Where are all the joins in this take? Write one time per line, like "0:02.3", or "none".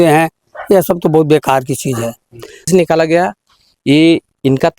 0:02.6

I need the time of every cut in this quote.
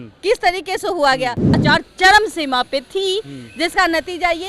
0:01.6

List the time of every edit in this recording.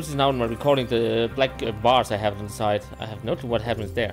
none

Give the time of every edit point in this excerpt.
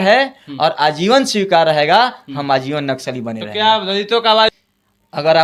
0:04.5

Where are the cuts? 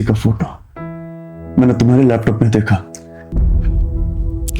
0:03.3

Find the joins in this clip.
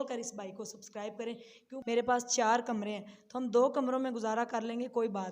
0:01.7

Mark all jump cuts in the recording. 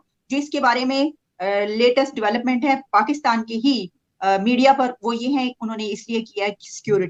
none

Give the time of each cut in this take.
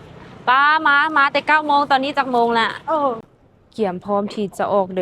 0:03.2

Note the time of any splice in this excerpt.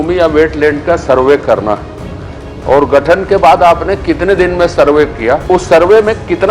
0:05.4

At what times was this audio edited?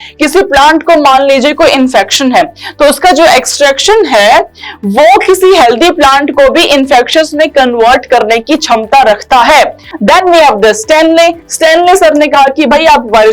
0:09.9

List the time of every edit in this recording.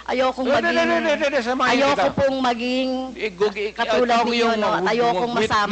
none

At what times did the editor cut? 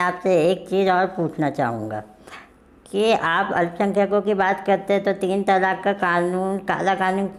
none

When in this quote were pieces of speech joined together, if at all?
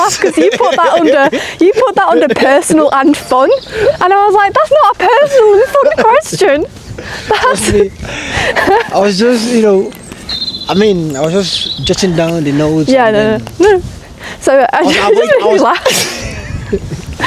none

